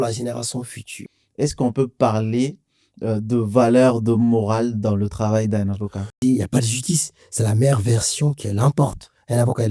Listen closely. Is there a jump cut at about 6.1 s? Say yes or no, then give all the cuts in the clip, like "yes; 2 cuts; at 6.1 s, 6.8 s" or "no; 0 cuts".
yes; 2 cuts; at 1.0 s, 6.1 s